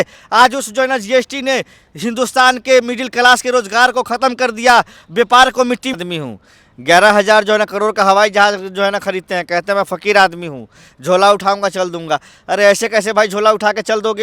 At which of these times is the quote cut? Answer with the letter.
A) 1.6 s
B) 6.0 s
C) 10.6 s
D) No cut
B